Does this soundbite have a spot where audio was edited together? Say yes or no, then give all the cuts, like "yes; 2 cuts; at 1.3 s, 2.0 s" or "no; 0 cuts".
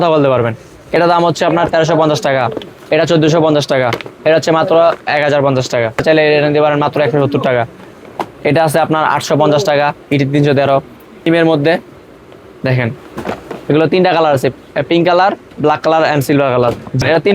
yes; 3 cuts; at 1.0 s, 6.0 s, 11.3 s